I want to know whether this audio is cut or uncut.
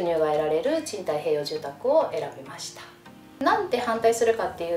cut